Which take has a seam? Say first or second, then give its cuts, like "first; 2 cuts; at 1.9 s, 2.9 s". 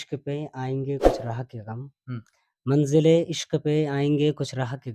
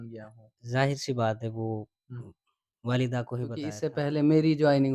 second; 1 cut; at 3.7 s